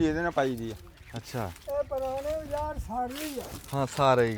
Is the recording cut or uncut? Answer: uncut